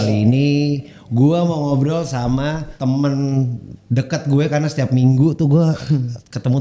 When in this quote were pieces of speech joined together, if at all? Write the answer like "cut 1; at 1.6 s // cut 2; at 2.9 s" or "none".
cut 1; at 2.7 s